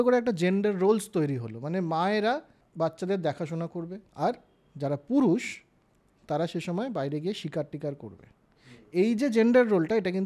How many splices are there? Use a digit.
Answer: 2